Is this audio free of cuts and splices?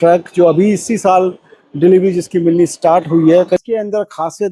no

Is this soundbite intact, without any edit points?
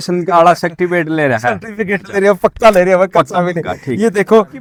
yes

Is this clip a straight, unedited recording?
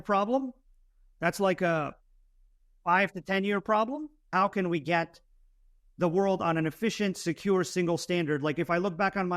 no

